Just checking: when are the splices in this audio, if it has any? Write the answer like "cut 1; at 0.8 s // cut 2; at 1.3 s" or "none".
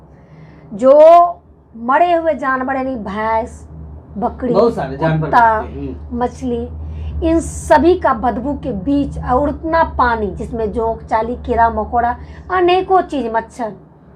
none